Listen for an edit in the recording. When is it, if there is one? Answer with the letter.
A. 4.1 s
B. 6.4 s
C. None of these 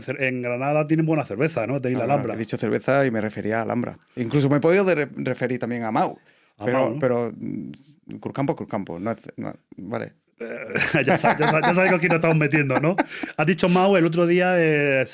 C